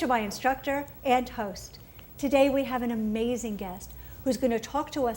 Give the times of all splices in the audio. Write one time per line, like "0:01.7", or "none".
0:02.5

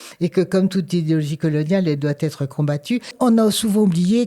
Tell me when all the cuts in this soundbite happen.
0:03.1

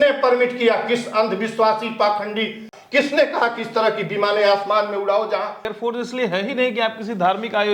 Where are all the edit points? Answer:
0:02.7
0:05.8

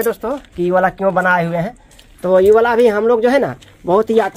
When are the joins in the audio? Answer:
none

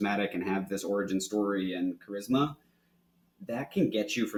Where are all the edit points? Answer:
none

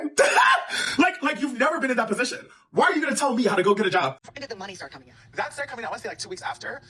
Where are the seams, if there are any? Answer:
0:04.2

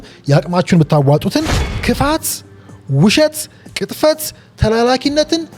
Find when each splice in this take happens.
0:01.7

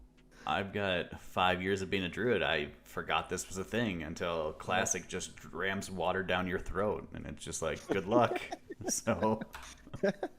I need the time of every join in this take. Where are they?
none

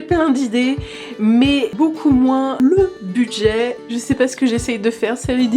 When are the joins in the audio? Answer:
0:01.7
0:02.6

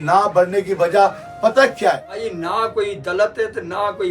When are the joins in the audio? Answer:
0:02.2

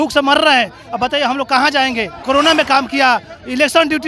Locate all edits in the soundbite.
0:02.1

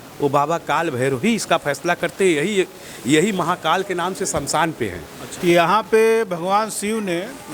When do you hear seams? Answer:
0:05.2

